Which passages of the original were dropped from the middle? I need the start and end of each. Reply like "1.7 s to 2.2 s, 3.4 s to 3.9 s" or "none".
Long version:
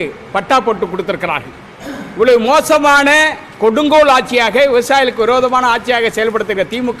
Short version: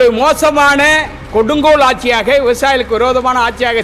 none